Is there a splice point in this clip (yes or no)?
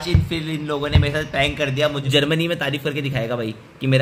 yes